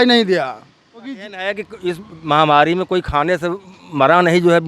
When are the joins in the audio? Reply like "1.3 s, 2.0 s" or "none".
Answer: 1.3 s